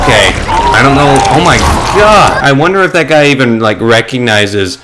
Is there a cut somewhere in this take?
yes; 1 cut; at 2.4 s

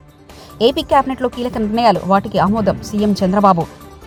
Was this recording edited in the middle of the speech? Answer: no; 0 cuts

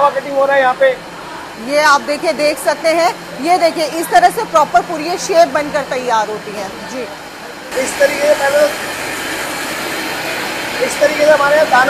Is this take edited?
no; 0 cuts

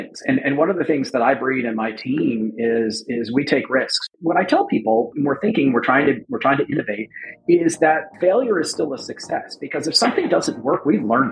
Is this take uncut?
no; 1 cut; at 4.1 s

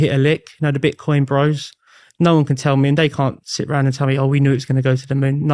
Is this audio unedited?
yes; 0 cuts

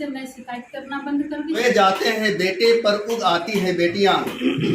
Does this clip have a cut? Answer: yes; 1 cut; at 1.6 s

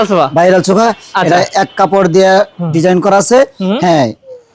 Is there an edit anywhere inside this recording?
no; 0 cuts

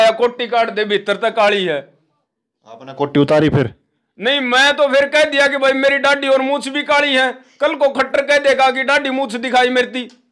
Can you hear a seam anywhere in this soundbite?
no; 0 cuts

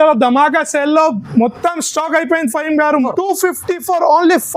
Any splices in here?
yes; 1 cut; at 3.1 s

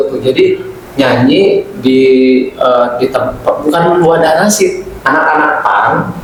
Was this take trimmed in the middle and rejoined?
no; 0 cuts

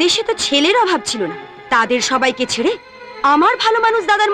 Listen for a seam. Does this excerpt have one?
no; 0 cuts

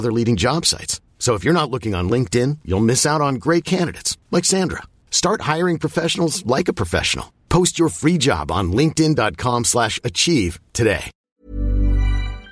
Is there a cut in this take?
yes; 1 cut; at 11.1 s

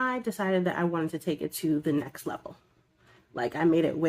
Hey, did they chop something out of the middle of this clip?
no; 0 cuts

